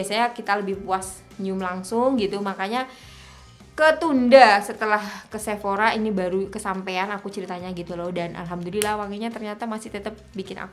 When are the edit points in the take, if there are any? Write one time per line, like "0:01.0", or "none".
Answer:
none